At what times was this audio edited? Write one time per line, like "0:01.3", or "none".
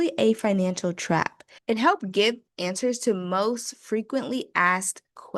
0:01.6